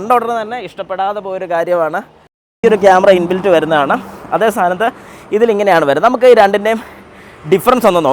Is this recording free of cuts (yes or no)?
no